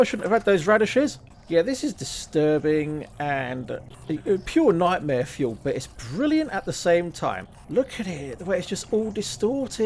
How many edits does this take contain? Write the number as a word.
three